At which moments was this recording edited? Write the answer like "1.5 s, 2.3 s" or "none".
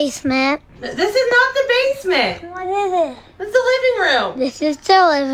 none

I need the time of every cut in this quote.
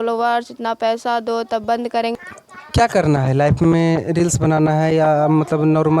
2.2 s

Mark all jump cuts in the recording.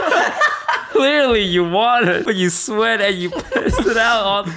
0.9 s, 2.2 s

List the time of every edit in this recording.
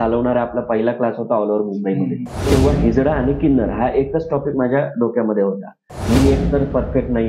2.5 s, 6.0 s

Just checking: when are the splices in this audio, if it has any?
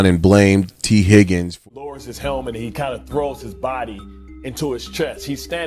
1.5 s

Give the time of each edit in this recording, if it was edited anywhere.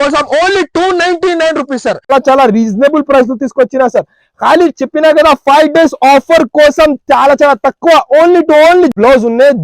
2.1 s, 8.9 s

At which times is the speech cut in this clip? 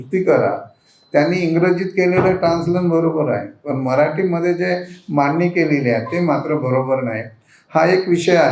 none

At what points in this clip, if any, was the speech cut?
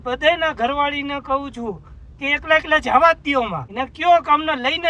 none

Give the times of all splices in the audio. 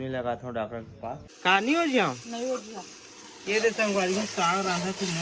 1.2 s

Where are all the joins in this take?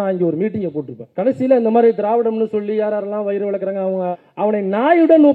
1.0 s, 4.2 s

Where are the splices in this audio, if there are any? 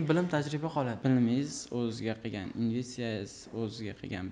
0.9 s

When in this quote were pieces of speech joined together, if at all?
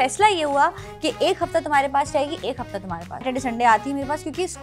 3.3 s

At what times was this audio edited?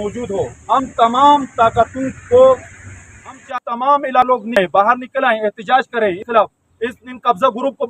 3.6 s

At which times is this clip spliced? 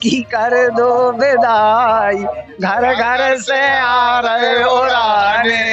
none

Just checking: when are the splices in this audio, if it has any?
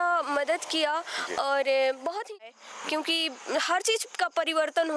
2.4 s

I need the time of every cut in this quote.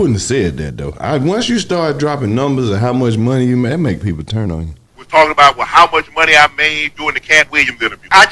none

